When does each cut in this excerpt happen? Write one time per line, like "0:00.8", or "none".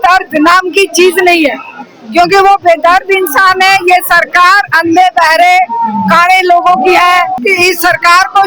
0:07.4